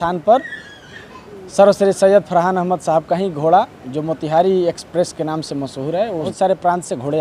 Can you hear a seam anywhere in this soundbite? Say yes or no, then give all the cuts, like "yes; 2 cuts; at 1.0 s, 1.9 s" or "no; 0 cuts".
yes; 1 cut; at 6.3 s